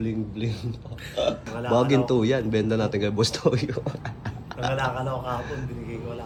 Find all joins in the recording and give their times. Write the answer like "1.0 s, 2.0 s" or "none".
none